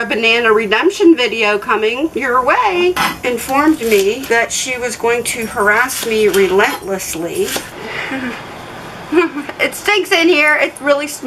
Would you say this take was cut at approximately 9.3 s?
no; 3 cuts; at 3.0 s, 4.2 s, 7.7 s

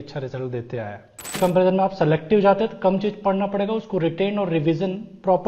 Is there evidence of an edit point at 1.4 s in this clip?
yes; 1 cut; at 1.4 s

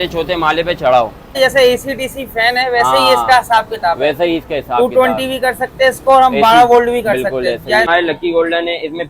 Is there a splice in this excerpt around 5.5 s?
no; 2 cuts; at 1.4 s, 7.9 s

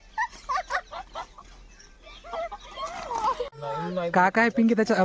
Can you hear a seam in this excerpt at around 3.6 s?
yes; 1 cut; at 3.6 s

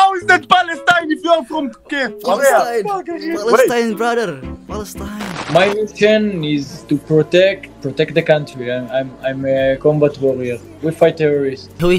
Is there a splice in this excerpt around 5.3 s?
yes; 1 cut; at 5.3 s

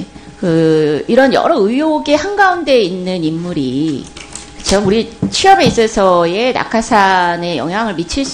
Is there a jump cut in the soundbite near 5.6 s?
no; 0 cuts

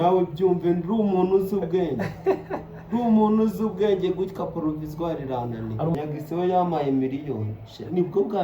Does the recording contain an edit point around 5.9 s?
yes; 1 cut; at 5.9 s

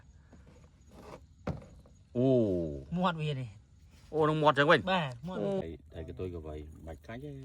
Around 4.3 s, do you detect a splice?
no; 1 cut; at 5.6 s

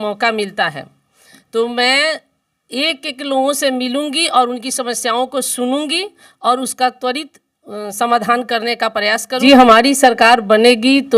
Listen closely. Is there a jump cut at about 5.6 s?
no; 1 cut; at 9.4 s

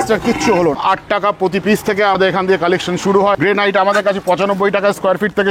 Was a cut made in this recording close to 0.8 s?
yes; 3 cuts; at 0.8 s, 2.2 s, 3.4 s

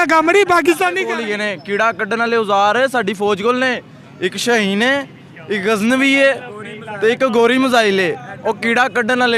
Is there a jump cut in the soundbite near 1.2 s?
yes; 1 cut; at 1.2 s

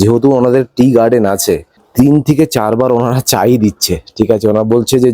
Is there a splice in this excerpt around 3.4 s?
no; 1 cut; at 1.8 s

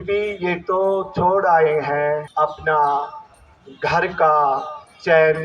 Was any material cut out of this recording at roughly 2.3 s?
yes; 1 cut; at 2.3 s

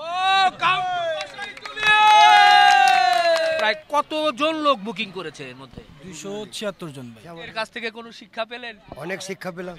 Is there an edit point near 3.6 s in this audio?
yes; 2 cuts; at 3.6 s, 7.4 s

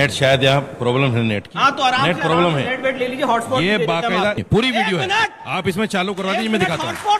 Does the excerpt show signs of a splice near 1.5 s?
no; 2 cuts; at 3.3 s, 4.4 s

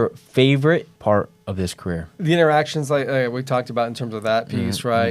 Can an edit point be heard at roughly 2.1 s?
yes; 2 cuts; at 0.9 s, 2.1 s

